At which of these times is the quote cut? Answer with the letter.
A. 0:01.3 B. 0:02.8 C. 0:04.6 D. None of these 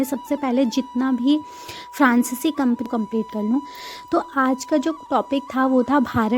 B